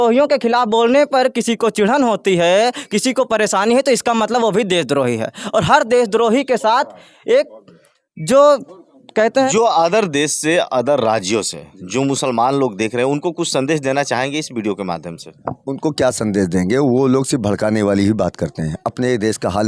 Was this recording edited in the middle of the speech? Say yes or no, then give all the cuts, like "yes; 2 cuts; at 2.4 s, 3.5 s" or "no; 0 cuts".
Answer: yes; 1 cut; at 9.5 s